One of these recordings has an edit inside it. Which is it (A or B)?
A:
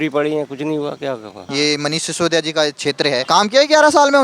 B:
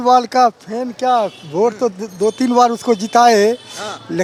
A